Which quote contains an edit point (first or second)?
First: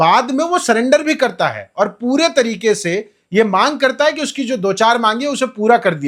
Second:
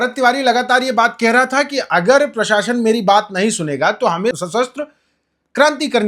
second